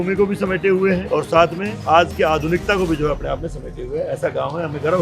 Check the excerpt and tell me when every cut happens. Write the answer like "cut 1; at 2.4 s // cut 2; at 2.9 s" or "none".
cut 1; at 1.0 s // cut 2; at 1.8 s